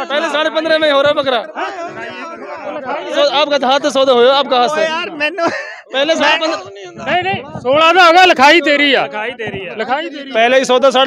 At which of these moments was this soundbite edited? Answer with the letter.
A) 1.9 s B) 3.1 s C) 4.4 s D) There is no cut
B